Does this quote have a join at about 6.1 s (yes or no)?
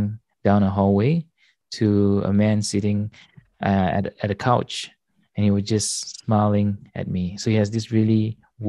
no